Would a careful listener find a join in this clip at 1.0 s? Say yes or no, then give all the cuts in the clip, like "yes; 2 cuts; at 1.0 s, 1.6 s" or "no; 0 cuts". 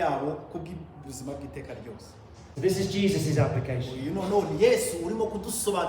no; 1 cut; at 2.5 s